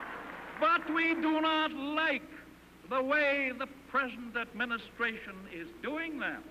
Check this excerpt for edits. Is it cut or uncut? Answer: cut